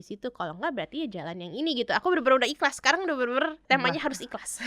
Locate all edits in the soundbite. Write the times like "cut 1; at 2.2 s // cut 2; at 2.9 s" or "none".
cut 1; at 3.6 s